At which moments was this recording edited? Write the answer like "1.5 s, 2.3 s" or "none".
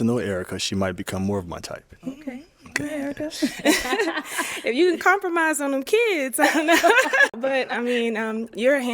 7.3 s